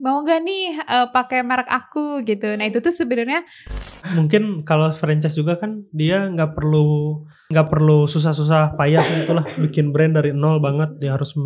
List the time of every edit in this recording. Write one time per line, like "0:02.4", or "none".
0:04.0
0:07.5